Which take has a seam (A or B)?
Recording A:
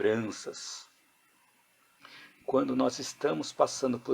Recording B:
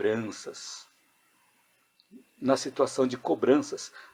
A